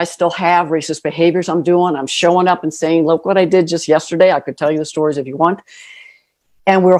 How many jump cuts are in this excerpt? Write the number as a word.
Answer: zero